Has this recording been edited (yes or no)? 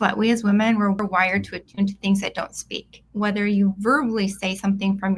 yes